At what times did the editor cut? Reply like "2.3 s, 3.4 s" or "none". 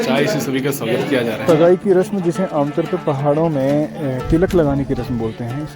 1.4 s

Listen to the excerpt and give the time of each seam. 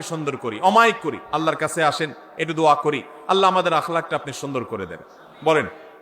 1.2 s

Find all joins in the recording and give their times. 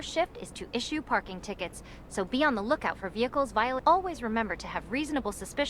3.8 s

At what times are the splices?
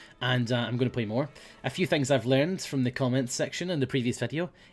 2.1 s

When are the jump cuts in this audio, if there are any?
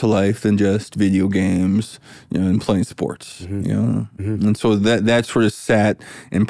none

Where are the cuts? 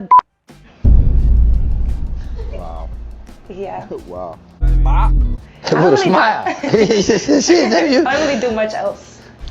none

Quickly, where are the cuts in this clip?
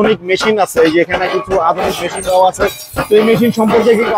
none

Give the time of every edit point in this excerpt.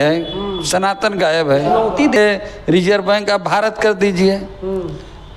2.2 s

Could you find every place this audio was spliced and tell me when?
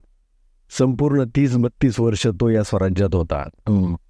none

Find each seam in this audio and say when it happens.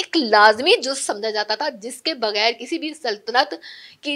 none

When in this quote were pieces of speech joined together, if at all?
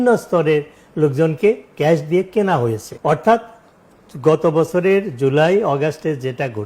2.9 s

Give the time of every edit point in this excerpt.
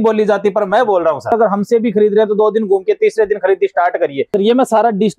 1.3 s, 4.3 s

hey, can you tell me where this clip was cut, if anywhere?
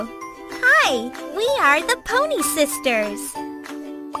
3.1 s

